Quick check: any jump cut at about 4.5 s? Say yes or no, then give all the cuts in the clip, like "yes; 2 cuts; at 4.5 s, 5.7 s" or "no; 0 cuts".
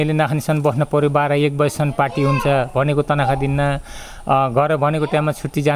no; 0 cuts